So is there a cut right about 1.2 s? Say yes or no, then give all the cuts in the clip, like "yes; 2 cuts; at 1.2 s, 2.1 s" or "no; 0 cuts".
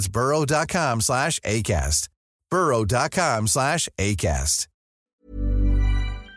no; 1 cut; at 5.1 s